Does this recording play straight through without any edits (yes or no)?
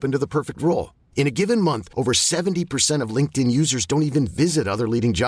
yes